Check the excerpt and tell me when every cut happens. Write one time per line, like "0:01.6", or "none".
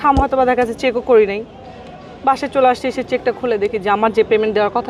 none